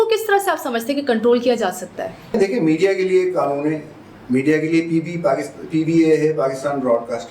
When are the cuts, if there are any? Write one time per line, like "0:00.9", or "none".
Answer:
0:02.3